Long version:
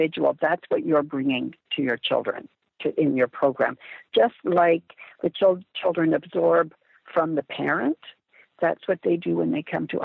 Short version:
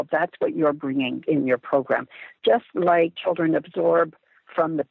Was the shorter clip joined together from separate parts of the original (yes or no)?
yes